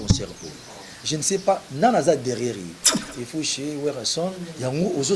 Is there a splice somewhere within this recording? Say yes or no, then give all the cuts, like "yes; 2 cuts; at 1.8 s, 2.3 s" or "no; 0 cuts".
yes; 1 cut; at 3.0 s